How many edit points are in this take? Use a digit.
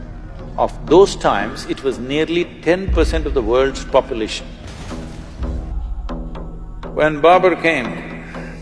1